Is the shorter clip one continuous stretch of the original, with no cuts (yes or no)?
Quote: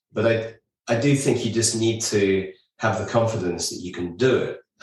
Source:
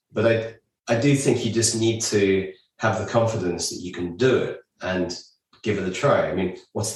yes